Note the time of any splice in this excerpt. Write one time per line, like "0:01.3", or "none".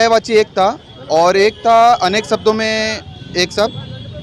none